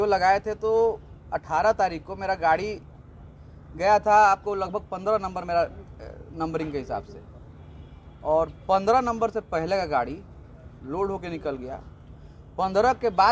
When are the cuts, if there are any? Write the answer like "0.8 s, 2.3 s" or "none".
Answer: none